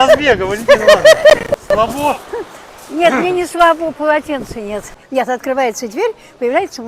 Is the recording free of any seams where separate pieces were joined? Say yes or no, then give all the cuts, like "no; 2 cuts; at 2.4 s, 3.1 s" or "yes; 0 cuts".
no; 1 cut; at 5.0 s